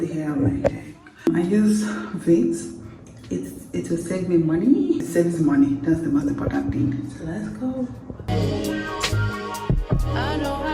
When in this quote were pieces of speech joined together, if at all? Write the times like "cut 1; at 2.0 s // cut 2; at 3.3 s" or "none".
cut 1; at 1.3 s // cut 2; at 5.1 s // cut 3; at 8.3 s